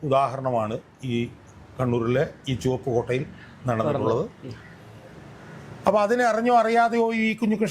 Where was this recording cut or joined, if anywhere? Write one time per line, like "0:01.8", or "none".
none

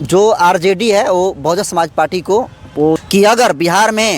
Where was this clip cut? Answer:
0:03.0

